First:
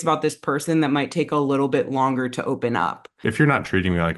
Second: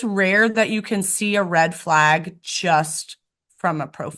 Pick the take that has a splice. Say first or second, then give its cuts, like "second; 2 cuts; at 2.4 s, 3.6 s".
first; 1 cut; at 3.2 s